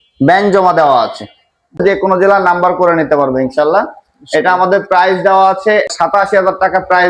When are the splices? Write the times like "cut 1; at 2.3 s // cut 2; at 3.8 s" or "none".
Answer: cut 1; at 1.8 s // cut 2; at 5.9 s